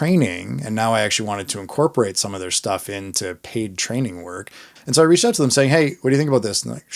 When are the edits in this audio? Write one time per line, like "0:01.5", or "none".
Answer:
0:04.7